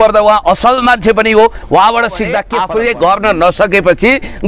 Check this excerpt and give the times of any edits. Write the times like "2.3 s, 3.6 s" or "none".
2.5 s